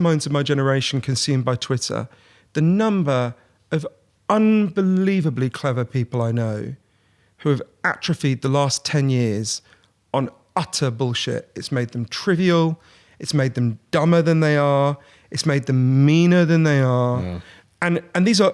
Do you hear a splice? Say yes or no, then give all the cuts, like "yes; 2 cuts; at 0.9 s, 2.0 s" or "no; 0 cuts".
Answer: no; 0 cuts